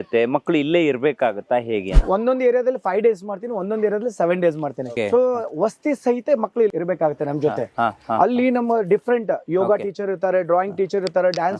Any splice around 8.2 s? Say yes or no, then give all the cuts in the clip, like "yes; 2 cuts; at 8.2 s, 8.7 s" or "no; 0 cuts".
no; 3 cuts; at 2.0 s, 4.9 s, 6.7 s